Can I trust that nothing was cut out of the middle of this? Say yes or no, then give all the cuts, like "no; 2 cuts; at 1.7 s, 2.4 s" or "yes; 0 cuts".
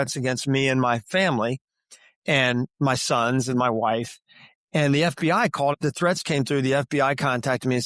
no; 1 cut; at 5.8 s